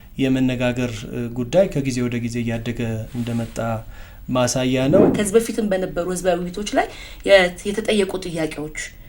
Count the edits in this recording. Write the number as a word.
one